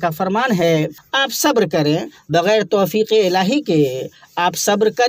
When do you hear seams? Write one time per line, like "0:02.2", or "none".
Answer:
0:01.0